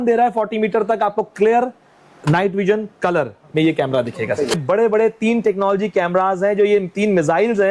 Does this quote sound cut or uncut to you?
cut